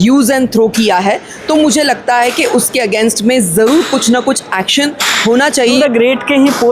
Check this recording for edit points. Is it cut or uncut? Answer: cut